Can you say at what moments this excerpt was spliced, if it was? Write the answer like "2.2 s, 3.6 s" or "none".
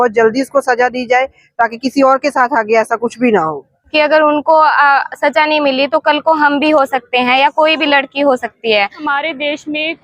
3.9 s, 9.0 s